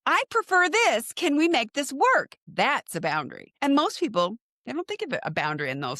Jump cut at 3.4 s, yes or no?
yes